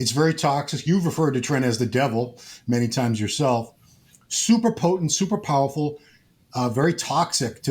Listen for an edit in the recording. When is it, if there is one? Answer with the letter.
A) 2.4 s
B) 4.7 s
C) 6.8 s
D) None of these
D